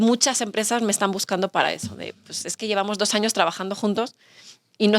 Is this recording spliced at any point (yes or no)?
no